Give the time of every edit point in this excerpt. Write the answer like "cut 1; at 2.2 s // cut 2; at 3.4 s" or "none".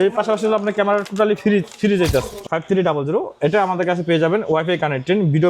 cut 1; at 2.4 s